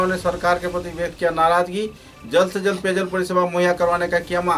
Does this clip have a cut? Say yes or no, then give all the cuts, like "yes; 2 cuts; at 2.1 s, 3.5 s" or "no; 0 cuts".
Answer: no; 0 cuts